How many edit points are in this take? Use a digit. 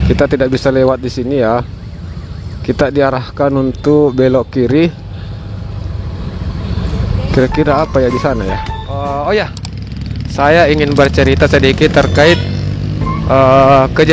1